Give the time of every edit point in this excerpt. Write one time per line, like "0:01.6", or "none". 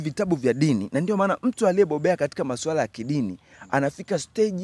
none